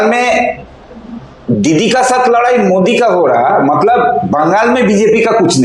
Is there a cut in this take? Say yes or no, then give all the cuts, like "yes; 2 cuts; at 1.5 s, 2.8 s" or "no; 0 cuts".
no; 0 cuts